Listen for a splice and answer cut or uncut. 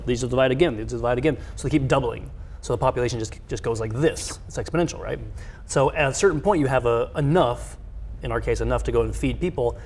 uncut